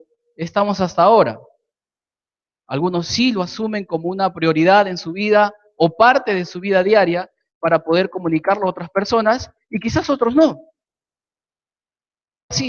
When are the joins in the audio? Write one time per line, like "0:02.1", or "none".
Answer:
0:05.6

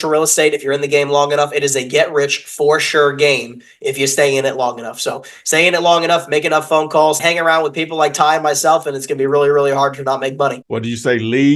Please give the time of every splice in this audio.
none

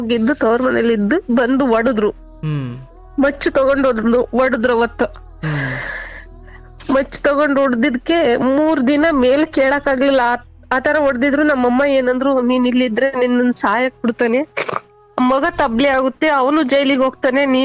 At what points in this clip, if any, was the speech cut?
none

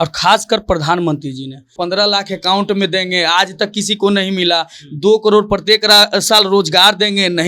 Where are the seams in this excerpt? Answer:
0:01.7

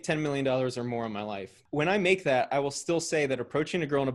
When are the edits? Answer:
0:01.6

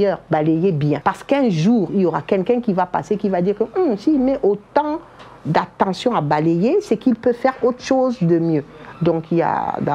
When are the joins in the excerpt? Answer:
0:01.0

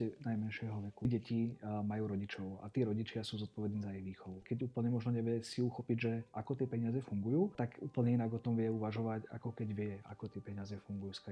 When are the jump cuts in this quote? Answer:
0:01.1
0:04.4
0:07.5

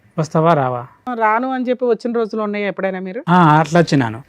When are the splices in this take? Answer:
0:01.1

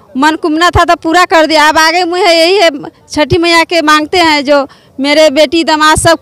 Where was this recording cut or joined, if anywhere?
none

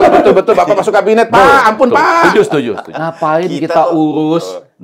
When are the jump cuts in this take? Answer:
0:02.9

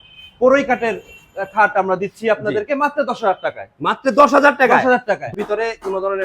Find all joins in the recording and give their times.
0:05.3

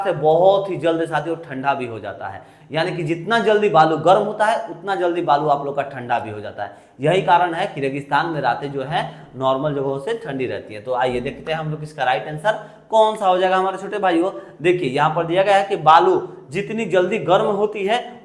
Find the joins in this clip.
none

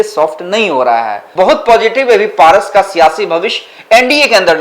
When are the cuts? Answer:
0:01.2

